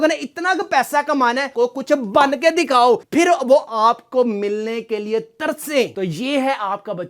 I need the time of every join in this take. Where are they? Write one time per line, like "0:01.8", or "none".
0:01.5